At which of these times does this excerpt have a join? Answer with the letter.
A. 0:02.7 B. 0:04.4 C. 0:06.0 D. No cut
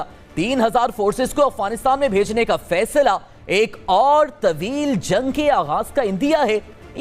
D